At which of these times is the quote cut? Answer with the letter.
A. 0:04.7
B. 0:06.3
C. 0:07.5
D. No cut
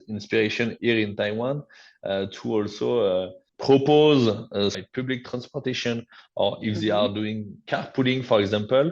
A